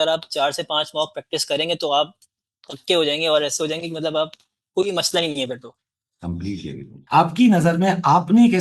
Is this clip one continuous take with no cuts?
no; 1 cut; at 6.9 s

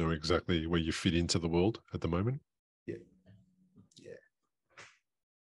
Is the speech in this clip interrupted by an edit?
no; 0 cuts

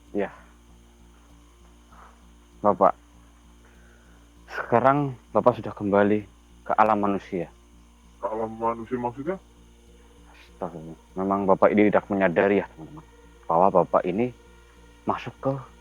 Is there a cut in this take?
no; 0 cuts

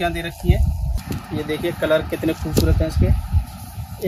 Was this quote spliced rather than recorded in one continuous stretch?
yes; 1 cut; at 1.0 s

